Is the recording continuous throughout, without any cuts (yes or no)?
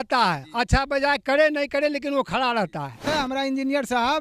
no